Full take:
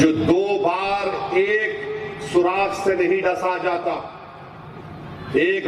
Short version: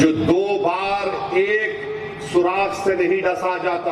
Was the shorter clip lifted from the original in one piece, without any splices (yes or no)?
yes